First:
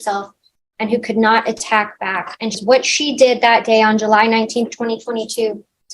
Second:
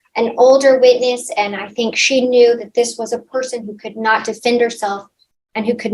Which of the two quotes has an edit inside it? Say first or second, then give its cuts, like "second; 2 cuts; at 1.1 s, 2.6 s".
first; 1 cut; at 2.6 s